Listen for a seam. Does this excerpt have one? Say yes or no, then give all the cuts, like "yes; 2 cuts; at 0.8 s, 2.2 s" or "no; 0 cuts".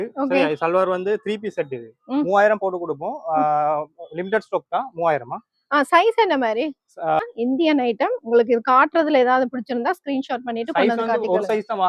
yes; 1 cut; at 7.2 s